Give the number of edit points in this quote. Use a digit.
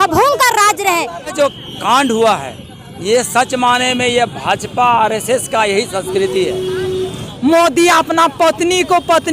2